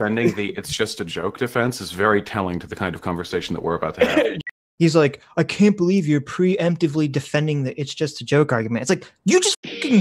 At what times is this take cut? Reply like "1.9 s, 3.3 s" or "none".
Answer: 4.4 s

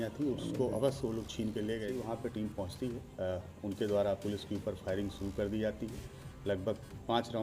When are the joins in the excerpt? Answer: 2.0 s

